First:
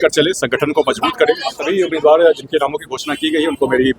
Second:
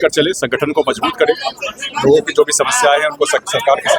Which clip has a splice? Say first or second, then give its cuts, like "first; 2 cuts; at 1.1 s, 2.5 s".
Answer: first; 1 cut; at 1.7 s